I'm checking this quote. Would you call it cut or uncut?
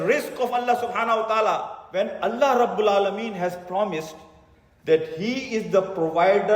cut